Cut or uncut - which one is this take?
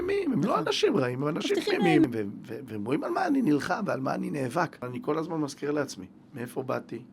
cut